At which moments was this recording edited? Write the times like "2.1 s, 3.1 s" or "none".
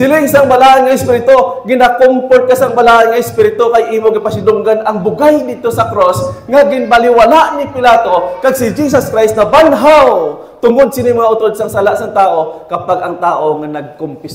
none

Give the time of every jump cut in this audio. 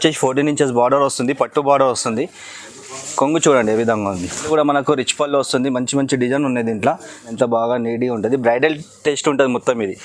4.4 s, 7.3 s

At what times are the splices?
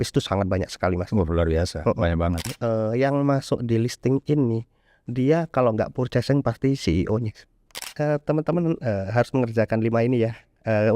2.5 s, 7.9 s

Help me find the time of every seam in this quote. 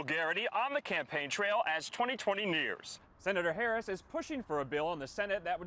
3.1 s

